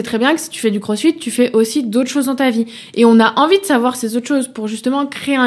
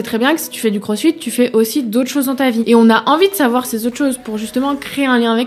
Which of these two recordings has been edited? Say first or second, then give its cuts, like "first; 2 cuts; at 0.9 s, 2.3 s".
second; 1 cut; at 2.6 s